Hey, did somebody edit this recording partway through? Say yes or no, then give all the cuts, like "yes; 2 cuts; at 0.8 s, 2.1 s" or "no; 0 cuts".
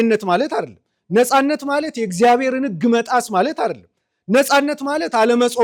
no; 0 cuts